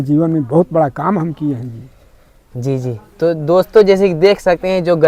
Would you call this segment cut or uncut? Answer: uncut